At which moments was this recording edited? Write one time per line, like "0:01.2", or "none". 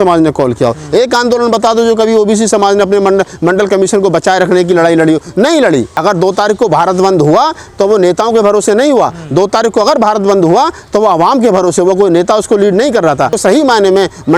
0:05.9
0:13.4